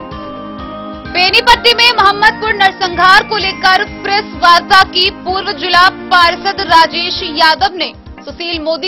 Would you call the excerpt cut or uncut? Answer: cut